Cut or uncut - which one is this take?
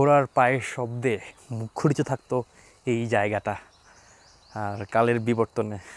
uncut